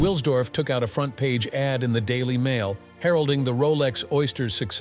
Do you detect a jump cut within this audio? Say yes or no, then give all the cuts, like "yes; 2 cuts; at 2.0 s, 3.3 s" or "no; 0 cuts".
no; 0 cuts